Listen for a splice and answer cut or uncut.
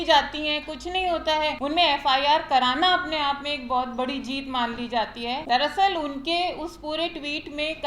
cut